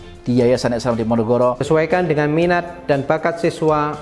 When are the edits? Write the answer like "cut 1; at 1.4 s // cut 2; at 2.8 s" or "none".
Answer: cut 1; at 1.6 s

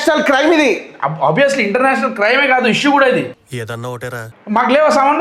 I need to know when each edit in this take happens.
cut 1; at 4.2 s

